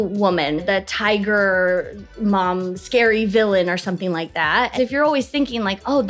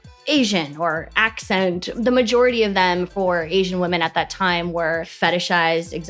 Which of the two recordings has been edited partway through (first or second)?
first